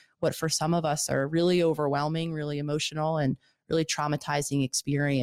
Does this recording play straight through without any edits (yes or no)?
yes